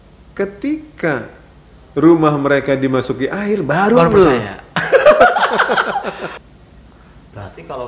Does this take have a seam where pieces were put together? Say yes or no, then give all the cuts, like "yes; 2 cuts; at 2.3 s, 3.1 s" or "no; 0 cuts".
yes; 1 cut; at 6.4 s